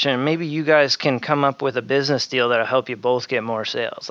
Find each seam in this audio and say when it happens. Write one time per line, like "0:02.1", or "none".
none